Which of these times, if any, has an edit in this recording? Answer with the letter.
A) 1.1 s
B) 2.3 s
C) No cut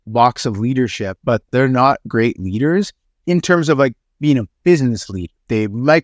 A